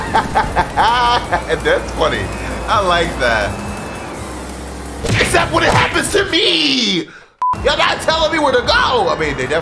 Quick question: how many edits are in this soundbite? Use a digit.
1